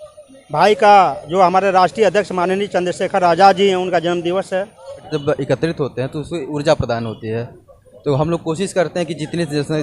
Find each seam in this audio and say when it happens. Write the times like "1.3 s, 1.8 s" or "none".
5.1 s